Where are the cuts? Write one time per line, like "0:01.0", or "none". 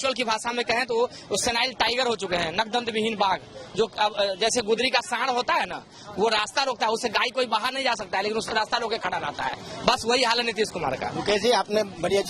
none